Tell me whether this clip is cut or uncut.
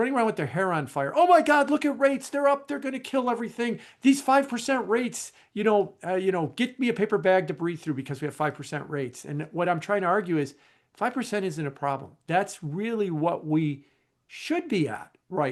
uncut